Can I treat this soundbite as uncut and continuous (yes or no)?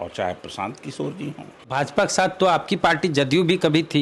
no